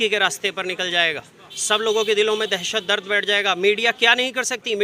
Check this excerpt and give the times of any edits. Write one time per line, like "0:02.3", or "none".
none